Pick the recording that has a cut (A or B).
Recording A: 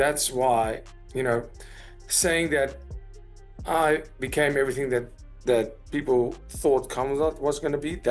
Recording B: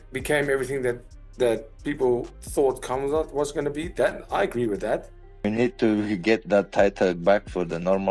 B